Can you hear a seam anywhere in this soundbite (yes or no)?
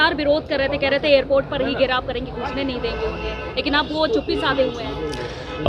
no